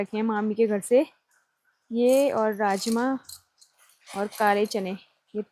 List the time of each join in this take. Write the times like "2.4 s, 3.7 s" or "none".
none